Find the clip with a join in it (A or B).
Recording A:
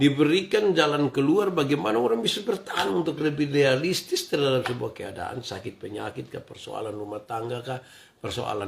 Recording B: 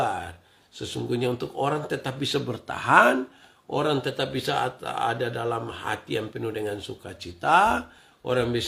A